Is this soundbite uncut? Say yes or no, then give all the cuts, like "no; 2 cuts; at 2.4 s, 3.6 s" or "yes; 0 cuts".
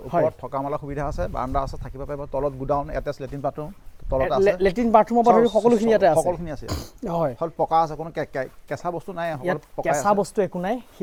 yes; 0 cuts